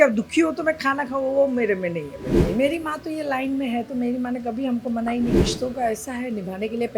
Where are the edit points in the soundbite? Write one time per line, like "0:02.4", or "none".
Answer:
0:02.4
0:05.4